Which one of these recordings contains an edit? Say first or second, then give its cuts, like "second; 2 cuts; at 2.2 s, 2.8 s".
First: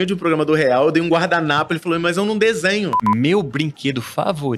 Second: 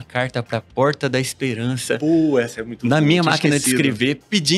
first; 1 cut; at 3.0 s